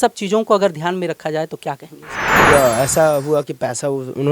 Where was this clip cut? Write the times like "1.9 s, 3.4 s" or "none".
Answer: 2.5 s